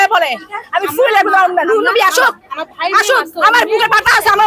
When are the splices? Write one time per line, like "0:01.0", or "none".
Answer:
none